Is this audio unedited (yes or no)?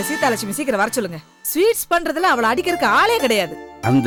yes